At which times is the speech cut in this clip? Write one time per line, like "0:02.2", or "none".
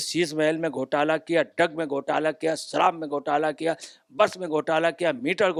none